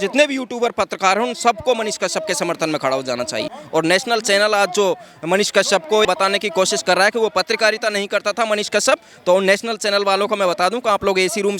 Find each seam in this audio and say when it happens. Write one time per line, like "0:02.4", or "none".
0:03.6
0:06.1